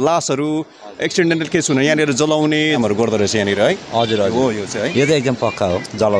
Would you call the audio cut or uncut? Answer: cut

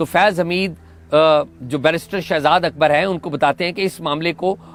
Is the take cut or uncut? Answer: uncut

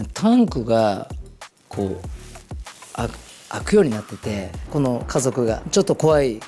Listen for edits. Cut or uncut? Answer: uncut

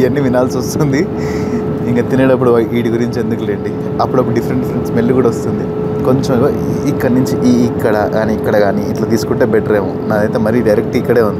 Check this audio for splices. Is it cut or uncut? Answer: uncut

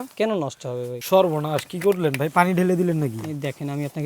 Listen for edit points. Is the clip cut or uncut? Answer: cut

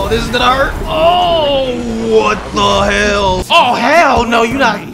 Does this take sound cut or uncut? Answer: cut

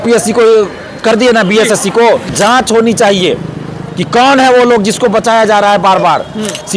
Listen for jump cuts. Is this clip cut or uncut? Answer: cut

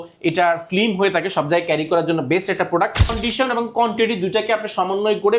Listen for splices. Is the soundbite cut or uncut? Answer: cut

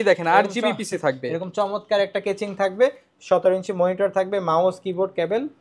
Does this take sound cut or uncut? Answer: uncut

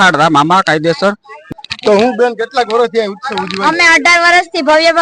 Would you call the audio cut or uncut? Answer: cut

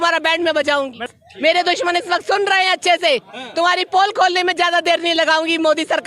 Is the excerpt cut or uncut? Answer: cut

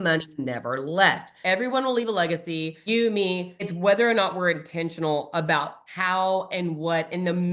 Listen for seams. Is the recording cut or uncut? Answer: cut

